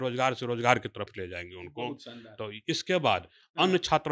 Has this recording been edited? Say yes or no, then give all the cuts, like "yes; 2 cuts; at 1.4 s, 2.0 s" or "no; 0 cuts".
no; 0 cuts